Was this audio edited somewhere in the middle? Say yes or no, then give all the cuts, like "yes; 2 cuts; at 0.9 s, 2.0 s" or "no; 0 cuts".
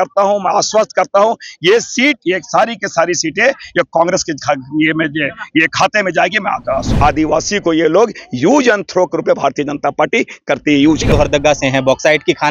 yes; 2 cuts; at 6.9 s, 11.1 s